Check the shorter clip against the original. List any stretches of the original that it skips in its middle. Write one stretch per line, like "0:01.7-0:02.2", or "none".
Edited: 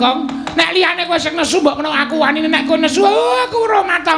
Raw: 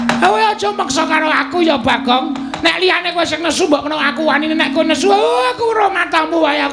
none